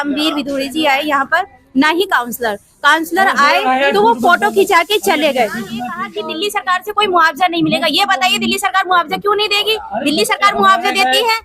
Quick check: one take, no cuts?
no; 1 cut; at 6.2 s

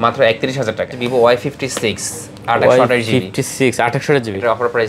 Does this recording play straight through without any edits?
no; 1 cut; at 0.9 s

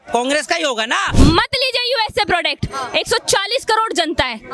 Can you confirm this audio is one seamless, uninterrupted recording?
no; 1 cut; at 1.1 s

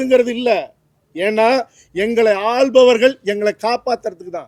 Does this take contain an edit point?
no; 0 cuts

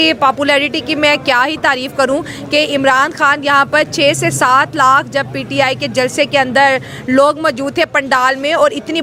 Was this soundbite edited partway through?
no; 0 cuts

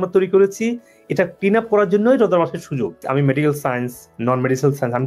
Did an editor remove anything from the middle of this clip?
yes; 1 cut; at 3.0 s

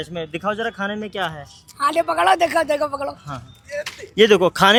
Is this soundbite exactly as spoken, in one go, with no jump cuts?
yes; 0 cuts

